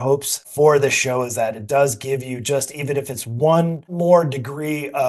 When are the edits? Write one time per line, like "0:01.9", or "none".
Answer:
0:03.9